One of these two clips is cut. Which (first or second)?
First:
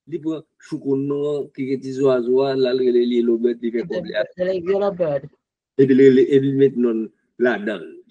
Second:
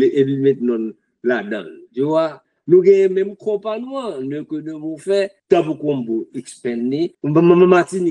second